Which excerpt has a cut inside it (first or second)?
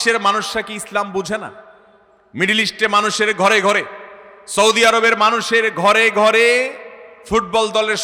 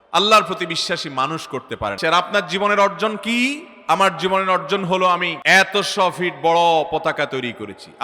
second